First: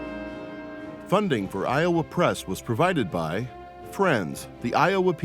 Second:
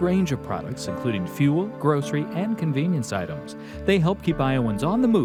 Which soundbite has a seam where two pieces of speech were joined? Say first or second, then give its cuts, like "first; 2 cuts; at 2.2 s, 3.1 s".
first; 1 cut; at 1.0 s